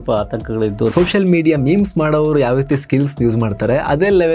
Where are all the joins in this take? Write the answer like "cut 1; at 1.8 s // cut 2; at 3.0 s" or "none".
cut 1; at 0.9 s

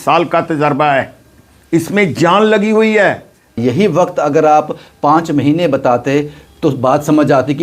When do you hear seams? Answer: cut 1; at 3.6 s

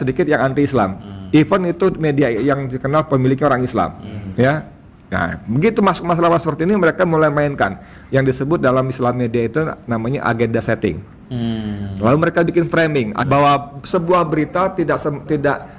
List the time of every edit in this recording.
cut 1; at 13.2 s

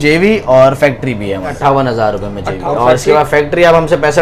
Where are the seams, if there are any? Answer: cut 1; at 1.5 s // cut 2; at 2.6 s

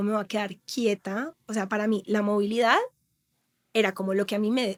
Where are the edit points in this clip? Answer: none

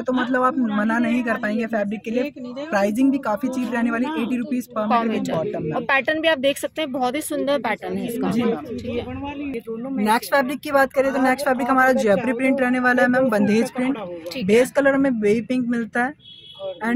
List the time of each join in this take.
none

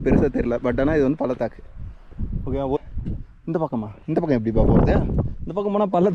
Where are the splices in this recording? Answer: cut 1; at 2.8 s

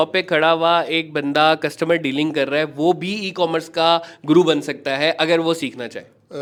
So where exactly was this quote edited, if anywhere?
none

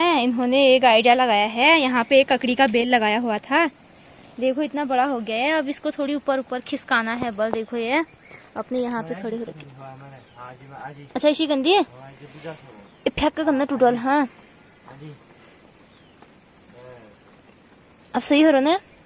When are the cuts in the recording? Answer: none

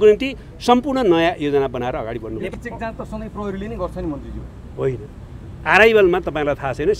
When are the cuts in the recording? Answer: cut 1; at 2.5 s

